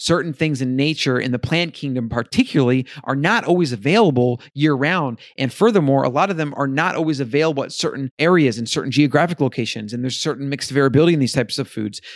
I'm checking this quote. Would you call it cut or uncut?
cut